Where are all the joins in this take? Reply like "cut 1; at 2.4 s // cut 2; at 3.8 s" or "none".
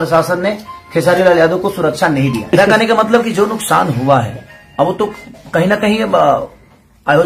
cut 1; at 2.5 s